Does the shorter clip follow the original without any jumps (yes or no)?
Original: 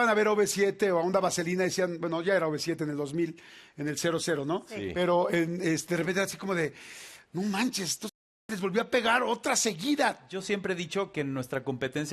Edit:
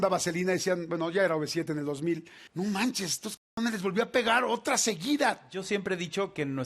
no